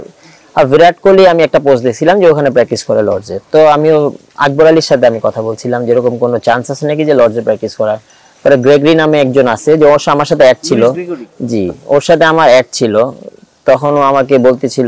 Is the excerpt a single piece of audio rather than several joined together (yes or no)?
yes